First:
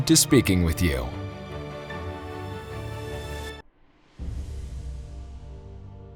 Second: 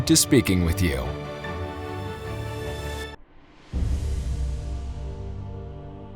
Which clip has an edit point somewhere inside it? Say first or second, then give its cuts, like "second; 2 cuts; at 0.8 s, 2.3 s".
second; 1 cut; at 1.1 s